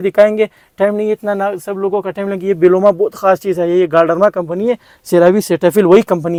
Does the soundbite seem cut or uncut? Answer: uncut